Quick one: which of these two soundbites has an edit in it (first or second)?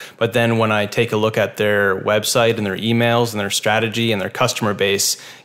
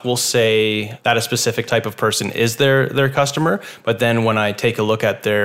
second